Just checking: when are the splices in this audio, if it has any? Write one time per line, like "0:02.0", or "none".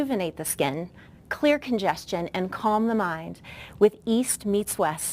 0:02.9